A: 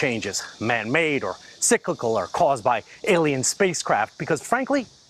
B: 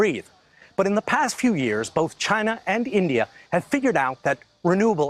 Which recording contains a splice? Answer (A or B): A